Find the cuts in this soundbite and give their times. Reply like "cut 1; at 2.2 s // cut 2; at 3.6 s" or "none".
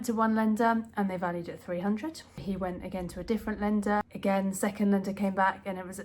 cut 1; at 2.4 s // cut 2; at 4.1 s